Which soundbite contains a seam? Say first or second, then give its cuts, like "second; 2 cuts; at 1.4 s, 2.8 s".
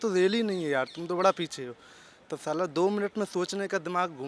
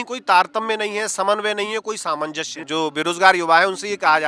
second; 1 cut; at 2.6 s